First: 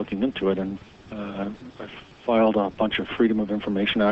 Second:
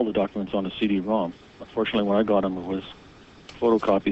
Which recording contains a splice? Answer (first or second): first